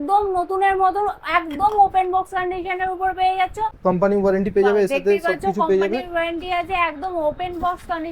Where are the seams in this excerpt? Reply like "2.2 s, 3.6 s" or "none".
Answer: 3.7 s